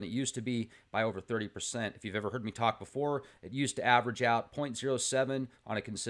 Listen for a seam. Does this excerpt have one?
yes; 1 cut; at 2.2 s

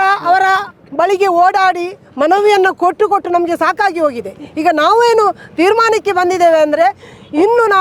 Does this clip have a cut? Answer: no; 0 cuts

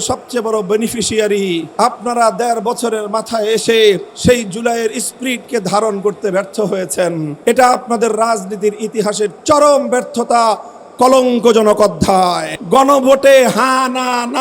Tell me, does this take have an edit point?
yes; 4 cuts; at 1.7 s, 4.1 s, 7.3 s, 12.5 s

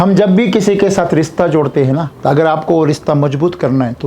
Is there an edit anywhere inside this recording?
yes; 1 cut; at 2.1 s

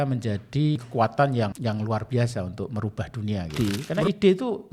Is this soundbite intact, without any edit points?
no; 3 cuts; at 0.8 s, 1.6 s, 3.5 s

